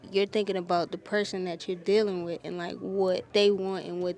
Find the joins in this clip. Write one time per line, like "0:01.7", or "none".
0:03.2